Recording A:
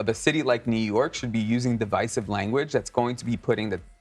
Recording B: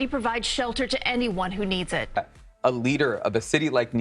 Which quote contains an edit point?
B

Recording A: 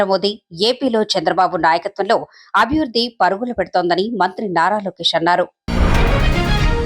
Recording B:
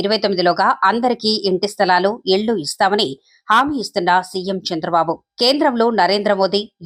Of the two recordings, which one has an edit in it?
A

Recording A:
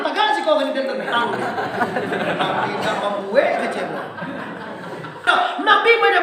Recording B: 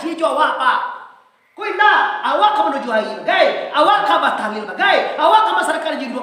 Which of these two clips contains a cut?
A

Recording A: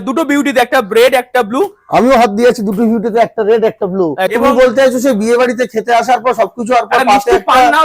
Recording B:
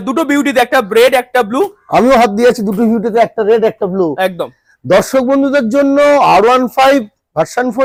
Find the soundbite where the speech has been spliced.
A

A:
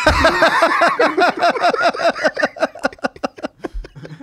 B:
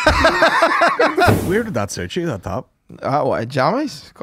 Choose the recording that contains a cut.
B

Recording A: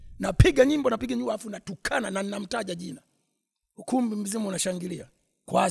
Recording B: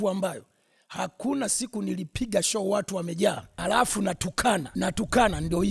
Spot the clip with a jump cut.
B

